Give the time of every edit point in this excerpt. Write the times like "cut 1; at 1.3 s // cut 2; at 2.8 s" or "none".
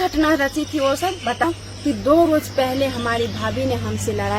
cut 1; at 1.4 s